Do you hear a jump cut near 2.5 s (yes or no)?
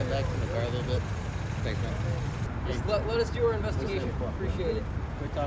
yes